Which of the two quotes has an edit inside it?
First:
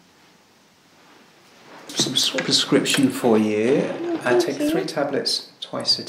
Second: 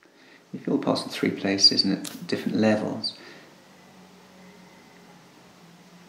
first; 1 cut; at 1.9 s

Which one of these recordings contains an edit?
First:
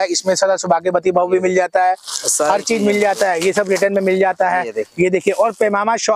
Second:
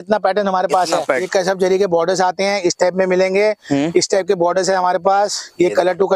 second; 1 cut; at 1.3 s

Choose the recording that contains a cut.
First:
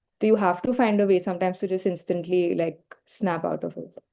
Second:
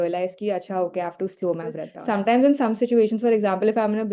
second; 1 cut; at 1.9 s

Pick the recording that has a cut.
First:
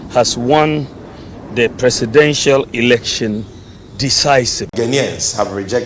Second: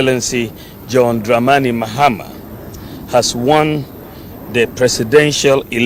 first; 1 cut; at 4.7 s

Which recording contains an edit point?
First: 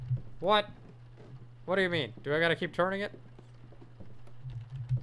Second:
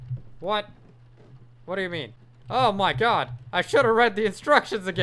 second; 1 cut; at 2.2 s

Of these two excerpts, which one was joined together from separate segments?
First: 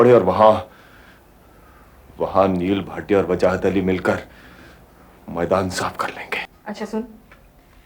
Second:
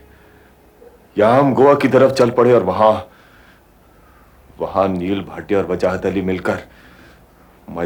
first; 1 cut; at 6.5 s

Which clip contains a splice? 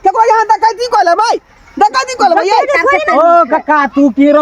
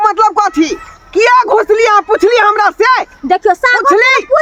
first; 1 cut; at 3.0 s

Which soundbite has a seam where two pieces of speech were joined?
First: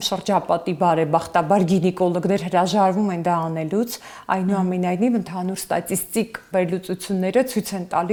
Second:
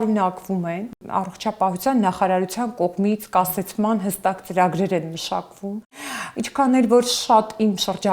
second; 1 cut; at 1.1 s

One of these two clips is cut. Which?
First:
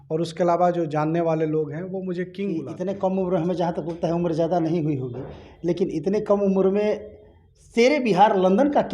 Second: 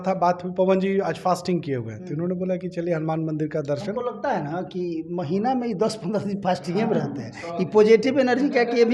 first; 1 cut; at 2.7 s

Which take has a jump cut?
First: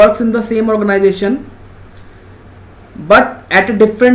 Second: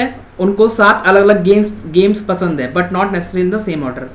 first; 1 cut; at 1.7 s

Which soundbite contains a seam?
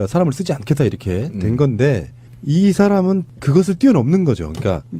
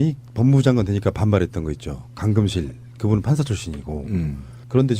second; 1 cut; at 1.2 s

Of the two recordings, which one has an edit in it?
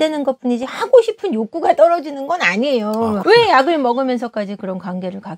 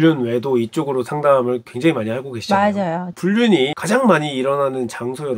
second; 1 cut; at 3.8 s

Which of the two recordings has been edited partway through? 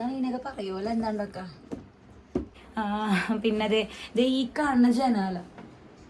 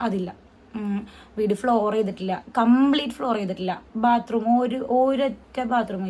first; 1 cut; at 2.6 s

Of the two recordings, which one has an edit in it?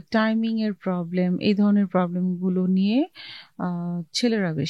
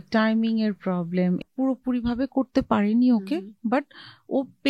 second; 1 cut; at 1.4 s

